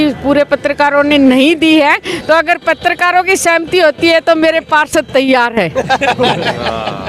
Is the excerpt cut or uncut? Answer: uncut